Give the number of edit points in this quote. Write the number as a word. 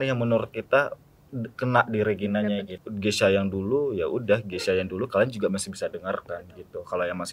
one